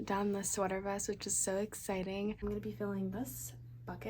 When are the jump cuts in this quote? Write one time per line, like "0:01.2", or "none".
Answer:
0:02.4